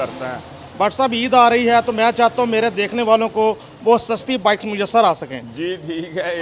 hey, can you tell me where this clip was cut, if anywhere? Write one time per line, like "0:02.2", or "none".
none

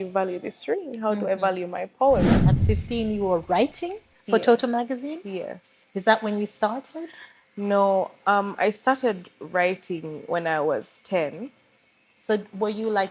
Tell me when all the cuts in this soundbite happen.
0:02.5

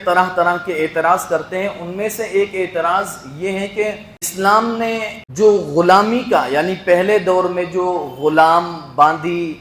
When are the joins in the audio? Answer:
0:04.3
0:05.2

